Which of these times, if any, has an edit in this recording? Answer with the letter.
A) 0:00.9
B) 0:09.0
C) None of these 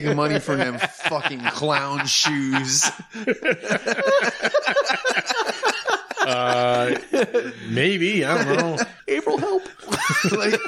B